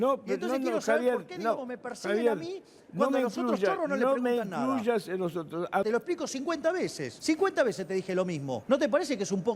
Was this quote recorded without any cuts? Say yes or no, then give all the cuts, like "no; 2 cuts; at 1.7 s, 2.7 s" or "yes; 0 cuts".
no; 3 cuts; at 5.8 s, 7.1 s, 8.5 s